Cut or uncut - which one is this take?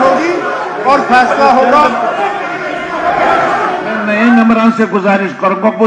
cut